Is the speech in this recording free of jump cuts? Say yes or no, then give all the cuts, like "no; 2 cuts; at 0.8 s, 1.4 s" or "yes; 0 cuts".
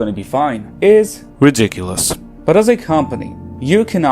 no; 1 cut; at 2.3 s